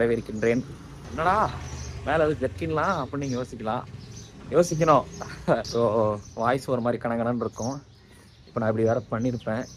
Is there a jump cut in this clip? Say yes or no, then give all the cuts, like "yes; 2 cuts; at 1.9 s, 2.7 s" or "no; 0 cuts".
no; 0 cuts